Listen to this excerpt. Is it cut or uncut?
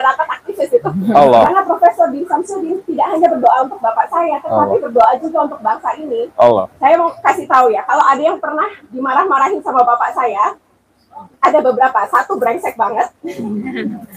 cut